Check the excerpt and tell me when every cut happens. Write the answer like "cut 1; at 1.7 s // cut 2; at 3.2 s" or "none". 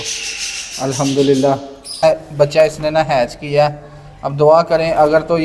cut 1; at 1.9 s